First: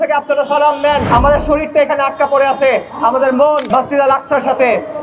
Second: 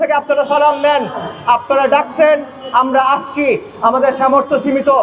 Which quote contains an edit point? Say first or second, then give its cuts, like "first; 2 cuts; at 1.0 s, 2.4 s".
first; 2 cuts; at 1.1 s, 3.7 s